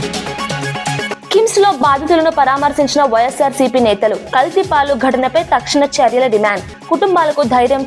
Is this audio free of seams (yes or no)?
yes